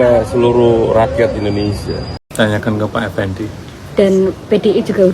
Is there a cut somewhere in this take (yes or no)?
yes